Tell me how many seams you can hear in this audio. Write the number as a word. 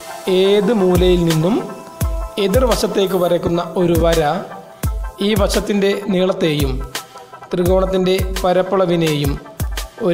zero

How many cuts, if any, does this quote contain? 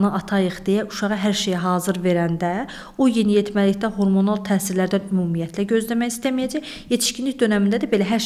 zero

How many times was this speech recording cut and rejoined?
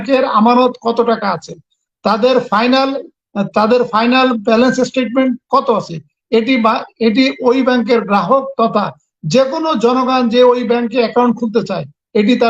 zero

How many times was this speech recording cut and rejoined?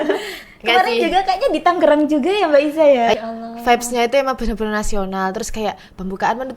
one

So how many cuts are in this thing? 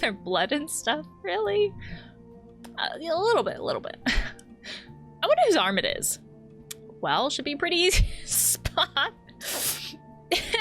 one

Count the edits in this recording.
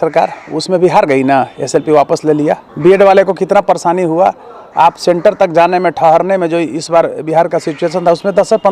one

